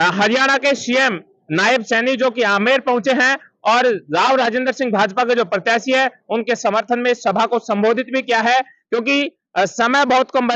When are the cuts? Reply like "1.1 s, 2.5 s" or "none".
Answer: none